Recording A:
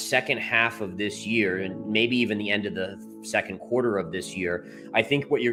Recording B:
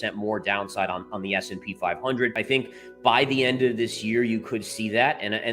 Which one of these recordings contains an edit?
B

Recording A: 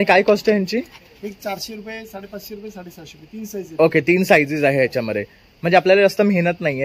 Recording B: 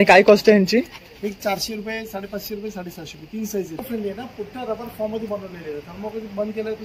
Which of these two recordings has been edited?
B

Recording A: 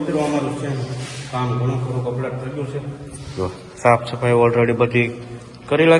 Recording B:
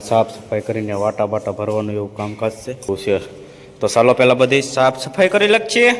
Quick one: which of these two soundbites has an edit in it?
B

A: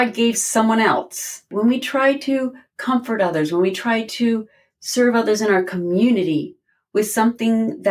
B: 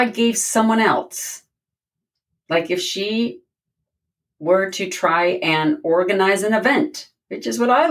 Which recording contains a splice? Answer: A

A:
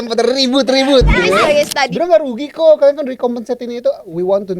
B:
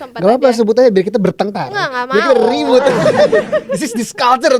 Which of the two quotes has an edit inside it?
A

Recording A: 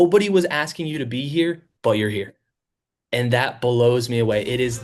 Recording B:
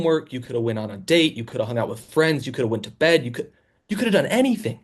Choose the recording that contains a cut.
A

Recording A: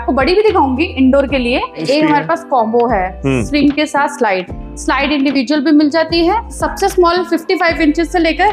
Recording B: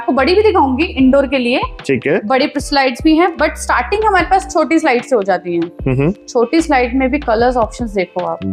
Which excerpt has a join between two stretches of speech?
A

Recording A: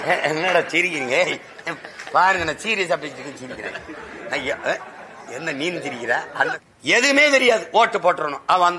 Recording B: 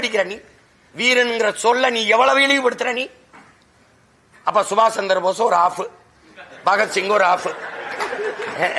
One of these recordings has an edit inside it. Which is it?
A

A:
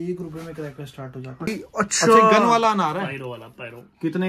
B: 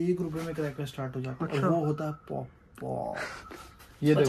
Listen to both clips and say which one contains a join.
A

